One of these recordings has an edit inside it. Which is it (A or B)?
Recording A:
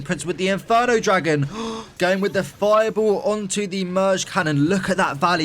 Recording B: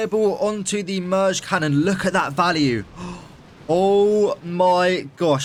A